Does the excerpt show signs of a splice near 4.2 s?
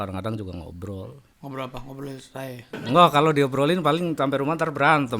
no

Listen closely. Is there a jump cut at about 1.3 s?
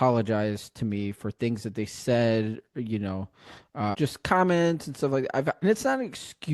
no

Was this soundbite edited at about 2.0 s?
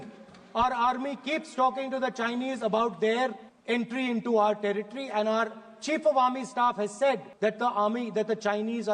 no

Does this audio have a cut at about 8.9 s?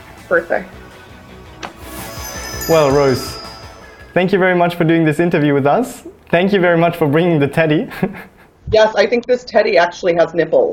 yes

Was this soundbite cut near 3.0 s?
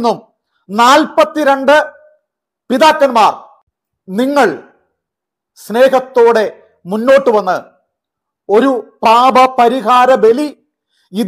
no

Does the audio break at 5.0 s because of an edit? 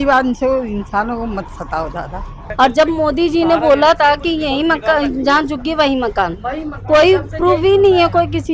no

